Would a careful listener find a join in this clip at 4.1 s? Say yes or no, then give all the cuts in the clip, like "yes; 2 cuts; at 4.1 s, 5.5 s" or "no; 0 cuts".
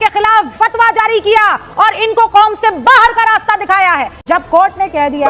yes; 1 cut; at 4.1 s